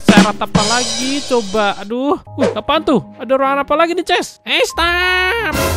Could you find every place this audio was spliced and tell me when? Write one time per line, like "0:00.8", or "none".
0:02.3